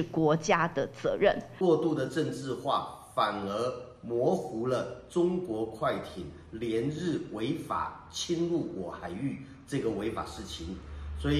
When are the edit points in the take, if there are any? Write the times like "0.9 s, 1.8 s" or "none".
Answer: 1.5 s